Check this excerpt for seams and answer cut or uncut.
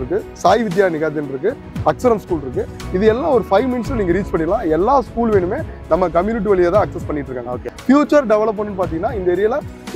cut